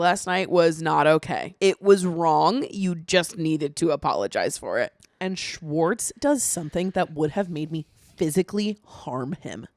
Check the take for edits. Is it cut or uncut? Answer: cut